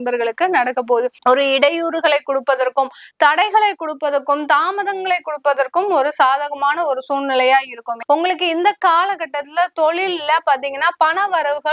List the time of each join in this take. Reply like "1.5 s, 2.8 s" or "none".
1.2 s, 7.9 s